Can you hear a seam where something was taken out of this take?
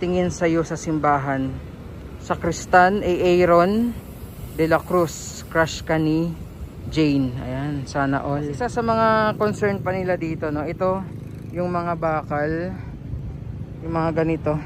yes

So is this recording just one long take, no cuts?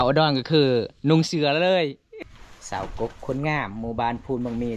no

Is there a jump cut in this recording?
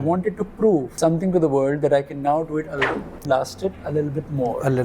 yes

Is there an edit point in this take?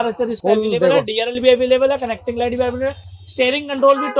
no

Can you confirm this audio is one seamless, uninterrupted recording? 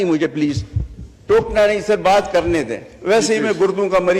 yes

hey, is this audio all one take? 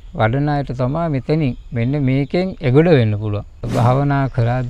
no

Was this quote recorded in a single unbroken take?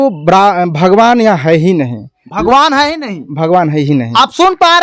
yes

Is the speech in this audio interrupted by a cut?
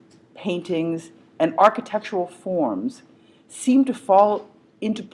no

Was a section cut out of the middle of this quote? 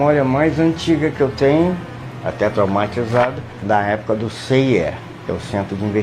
yes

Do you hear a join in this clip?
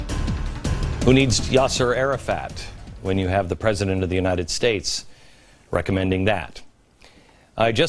no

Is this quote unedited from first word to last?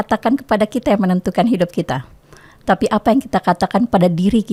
yes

